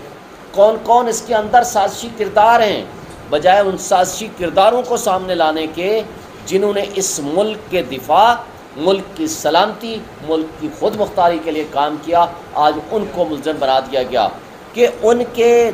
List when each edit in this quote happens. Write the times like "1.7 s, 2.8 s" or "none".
14.5 s